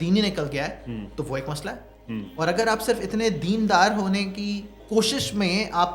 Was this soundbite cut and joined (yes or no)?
yes